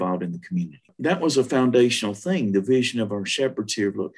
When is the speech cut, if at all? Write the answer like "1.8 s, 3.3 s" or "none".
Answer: 0.9 s